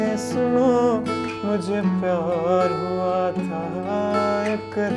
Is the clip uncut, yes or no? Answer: yes